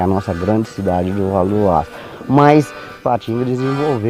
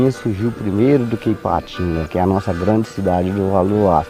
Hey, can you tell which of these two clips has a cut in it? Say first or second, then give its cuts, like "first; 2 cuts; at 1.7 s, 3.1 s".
first; 1 cut; at 3.0 s